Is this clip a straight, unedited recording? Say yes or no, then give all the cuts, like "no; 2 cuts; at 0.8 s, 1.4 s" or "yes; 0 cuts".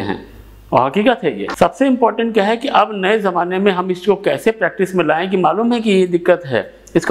yes; 0 cuts